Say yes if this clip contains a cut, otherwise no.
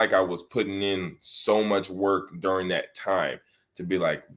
no